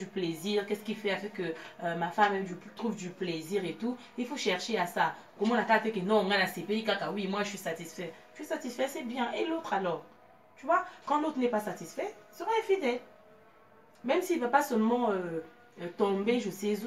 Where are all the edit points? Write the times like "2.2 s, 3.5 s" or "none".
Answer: none